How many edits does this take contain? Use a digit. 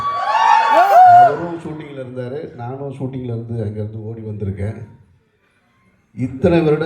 0